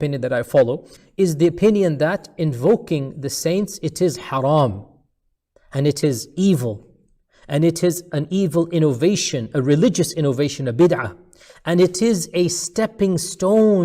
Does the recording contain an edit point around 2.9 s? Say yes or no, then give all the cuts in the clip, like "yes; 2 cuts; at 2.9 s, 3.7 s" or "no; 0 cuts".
no; 1 cut; at 1.0 s